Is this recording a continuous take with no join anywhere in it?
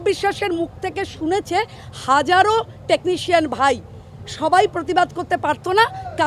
yes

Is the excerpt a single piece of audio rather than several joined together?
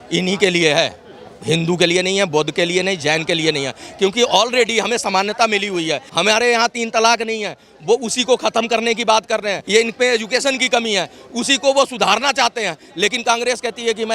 no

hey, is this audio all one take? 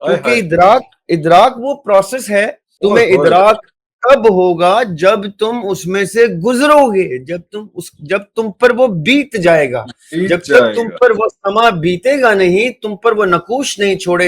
no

